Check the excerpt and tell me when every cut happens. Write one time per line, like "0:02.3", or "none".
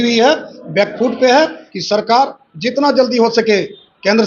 0:01.7